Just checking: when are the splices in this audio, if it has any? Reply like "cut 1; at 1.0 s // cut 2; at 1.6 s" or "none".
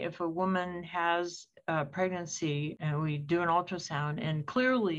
cut 1; at 2.8 s